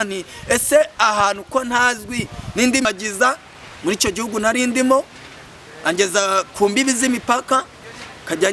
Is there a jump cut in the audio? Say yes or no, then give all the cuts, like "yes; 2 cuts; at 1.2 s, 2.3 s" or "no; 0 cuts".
yes; 1 cut; at 2.8 s